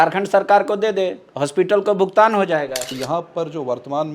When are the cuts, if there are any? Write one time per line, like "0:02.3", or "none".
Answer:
0:02.9